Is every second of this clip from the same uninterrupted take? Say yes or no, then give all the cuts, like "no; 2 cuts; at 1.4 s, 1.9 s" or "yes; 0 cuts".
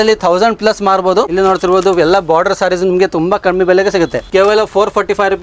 no; 2 cuts; at 1.3 s, 4.2 s